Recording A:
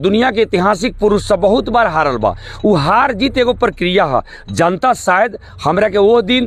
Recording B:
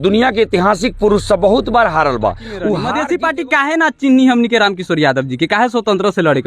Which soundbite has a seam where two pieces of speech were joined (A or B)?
B